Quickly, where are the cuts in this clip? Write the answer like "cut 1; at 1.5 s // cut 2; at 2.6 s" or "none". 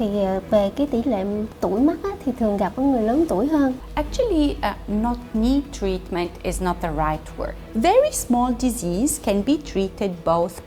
cut 1; at 3.8 s // cut 2; at 7.6 s